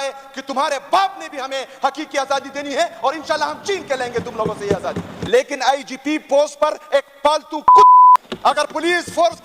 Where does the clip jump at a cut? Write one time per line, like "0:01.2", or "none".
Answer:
0:05.1
0:08.2

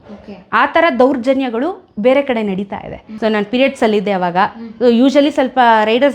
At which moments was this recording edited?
0:03.0

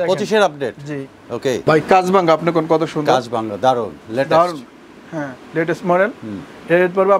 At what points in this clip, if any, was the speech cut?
0:01.6

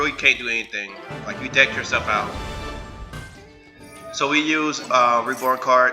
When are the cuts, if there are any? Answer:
0:03.2

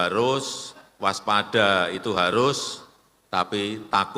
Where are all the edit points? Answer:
none

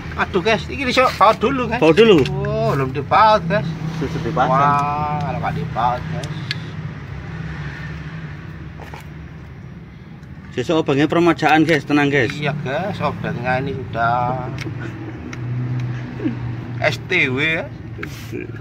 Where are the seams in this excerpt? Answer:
none

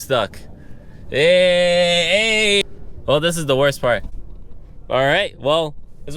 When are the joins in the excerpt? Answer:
0:02.6

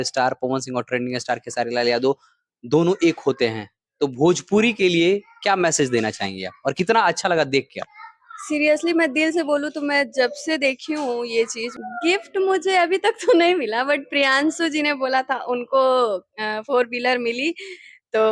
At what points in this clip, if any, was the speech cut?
0:11.7

